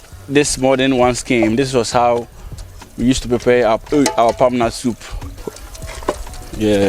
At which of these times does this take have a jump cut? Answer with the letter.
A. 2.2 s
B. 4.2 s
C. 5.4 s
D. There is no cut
C